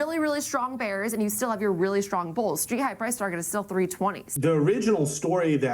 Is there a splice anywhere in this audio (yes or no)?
yes